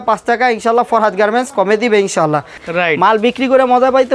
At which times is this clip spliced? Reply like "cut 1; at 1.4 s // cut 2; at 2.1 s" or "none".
cut 1; at 2.5 s